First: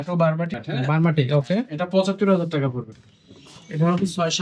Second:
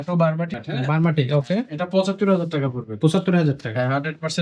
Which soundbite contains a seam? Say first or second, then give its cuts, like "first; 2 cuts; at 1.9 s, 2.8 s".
first; 1 cut; at 2.8 s